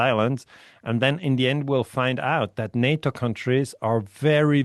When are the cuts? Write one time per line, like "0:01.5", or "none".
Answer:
none